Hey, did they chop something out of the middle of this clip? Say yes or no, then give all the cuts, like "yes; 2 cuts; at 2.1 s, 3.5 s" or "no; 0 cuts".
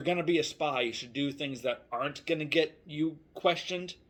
no; 0 cuts